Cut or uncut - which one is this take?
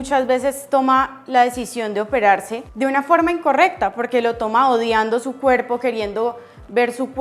cut